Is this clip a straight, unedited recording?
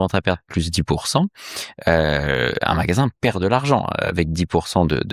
yes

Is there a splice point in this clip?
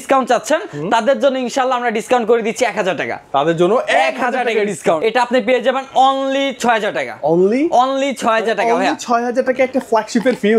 yes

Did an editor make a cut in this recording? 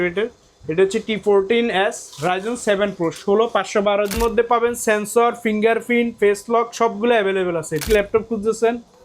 yes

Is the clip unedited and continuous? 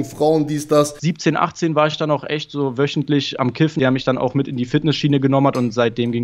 no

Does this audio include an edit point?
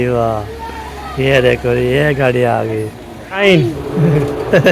yes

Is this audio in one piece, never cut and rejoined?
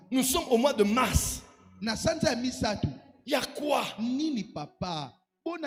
yes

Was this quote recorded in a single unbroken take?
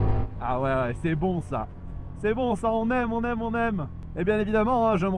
yes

